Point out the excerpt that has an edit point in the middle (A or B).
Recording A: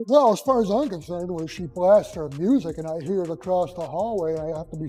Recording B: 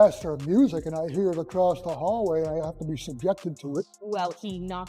B